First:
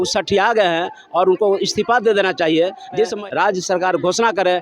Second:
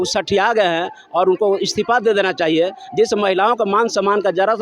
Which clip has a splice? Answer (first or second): first